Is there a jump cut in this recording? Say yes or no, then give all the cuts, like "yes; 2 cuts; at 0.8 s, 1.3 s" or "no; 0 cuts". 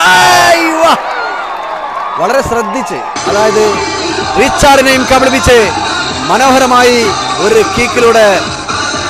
no; 0 cuts